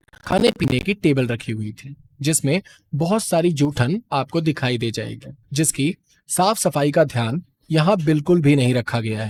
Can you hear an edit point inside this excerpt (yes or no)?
no